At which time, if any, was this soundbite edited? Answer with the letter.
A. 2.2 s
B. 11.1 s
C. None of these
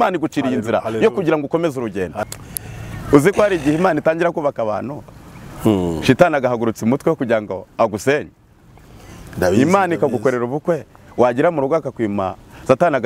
A